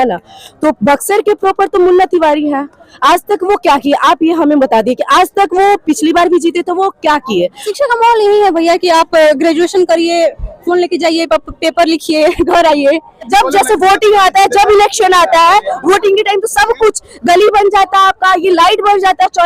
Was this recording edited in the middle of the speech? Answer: yes; 2 cuts; at 7.6 s, 13.3 s

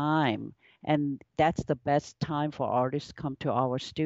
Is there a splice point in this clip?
no; 0 cuts

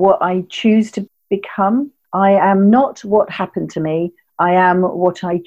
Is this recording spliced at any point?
no; 0 cuts

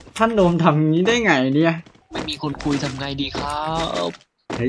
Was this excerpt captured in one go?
no; 1 cut; at 1.8 s

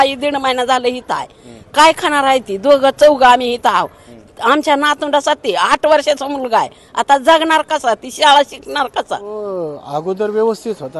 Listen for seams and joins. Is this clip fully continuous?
no; 1 cut; at 9.4 s

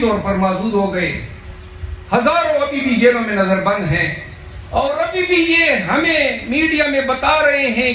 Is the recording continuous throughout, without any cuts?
yes; 0 cuts

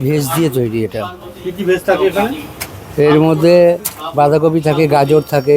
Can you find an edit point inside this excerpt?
no; 0 cuts

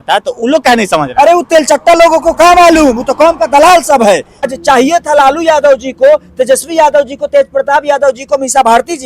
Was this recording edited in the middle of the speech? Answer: yes; 1 cut; at 4.5 s

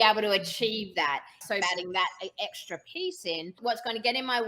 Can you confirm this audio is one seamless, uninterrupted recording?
no; 2 cuts; at 1.5 s, 3.5 s

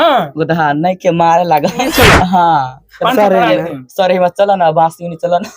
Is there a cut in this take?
yes; 1 cut; at 1.9 s

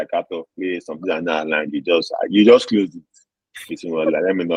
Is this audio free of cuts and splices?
yes; 0 cuts

